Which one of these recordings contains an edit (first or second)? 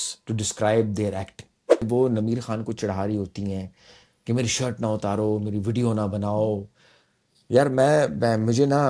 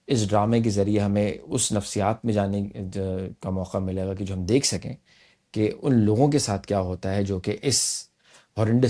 first